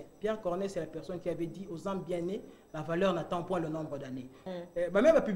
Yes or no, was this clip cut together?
yes